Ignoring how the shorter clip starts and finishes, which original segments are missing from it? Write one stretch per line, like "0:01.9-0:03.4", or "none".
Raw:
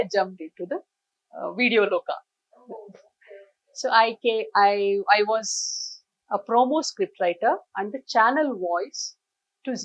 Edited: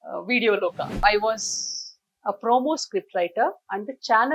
0:02.3-0:05.0